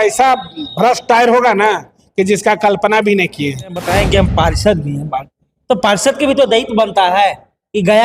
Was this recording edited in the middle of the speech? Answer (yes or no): yes